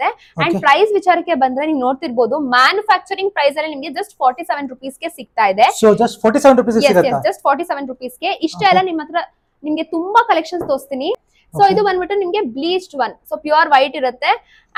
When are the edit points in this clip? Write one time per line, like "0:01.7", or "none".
none